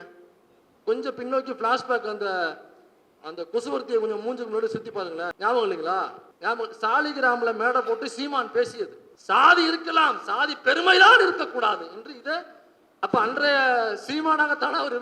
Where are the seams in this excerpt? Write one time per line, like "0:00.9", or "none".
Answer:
0:05.3
0:06.2
0:09.1

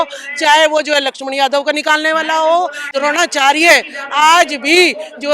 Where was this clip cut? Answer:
0:02.8

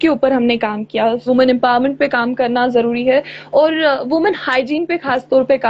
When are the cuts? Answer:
0:01.2

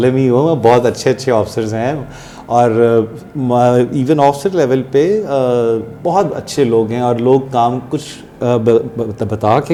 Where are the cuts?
none

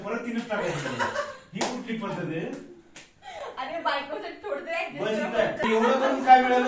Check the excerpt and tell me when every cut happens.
0:05.6

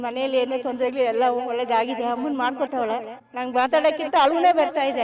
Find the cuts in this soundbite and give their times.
0:03.2

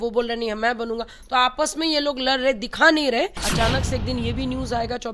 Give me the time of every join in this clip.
0:03.3

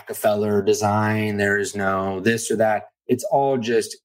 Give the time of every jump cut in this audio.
0:02.9

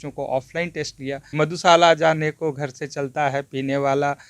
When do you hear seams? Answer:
0:01.3

